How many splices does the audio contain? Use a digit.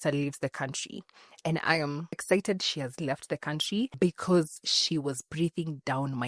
2